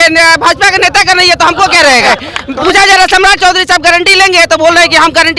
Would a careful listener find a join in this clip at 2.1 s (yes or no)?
yes